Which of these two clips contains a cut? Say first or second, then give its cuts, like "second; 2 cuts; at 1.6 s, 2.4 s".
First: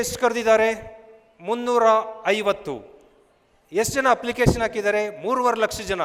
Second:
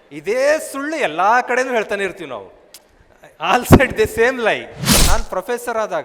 second; 1 cut; at 4.9 s